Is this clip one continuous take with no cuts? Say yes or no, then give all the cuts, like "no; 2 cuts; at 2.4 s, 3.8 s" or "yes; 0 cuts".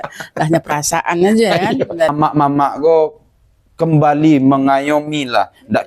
no; 1 cut; at 2.1 s